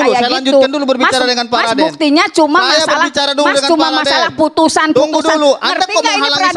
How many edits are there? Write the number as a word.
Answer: zero